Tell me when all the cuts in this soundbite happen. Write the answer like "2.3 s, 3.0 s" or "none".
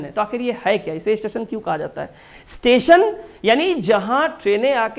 none